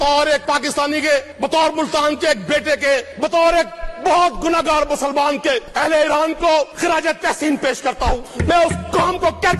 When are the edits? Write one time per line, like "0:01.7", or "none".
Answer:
0:01.3
0:03.2
0:05.7
0:06.7
0:08.3

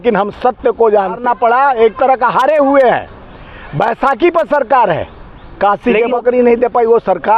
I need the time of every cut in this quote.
0:01.2
0:06.2

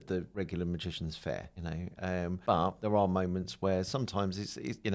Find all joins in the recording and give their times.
0:02.4

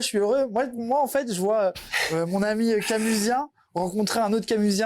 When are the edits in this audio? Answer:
none

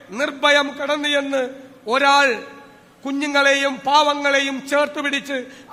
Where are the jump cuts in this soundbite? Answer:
none

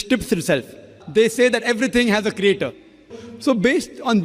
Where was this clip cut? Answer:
0:01.0
0:03.2

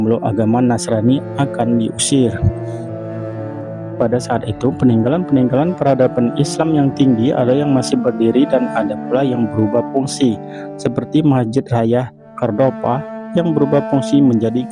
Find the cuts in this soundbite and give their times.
none

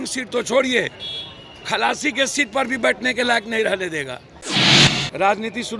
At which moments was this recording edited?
0:04.5

